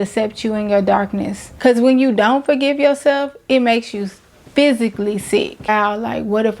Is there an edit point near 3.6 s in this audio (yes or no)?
no